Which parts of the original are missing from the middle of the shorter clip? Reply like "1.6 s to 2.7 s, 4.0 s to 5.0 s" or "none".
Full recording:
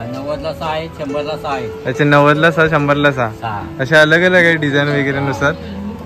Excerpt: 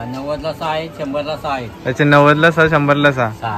none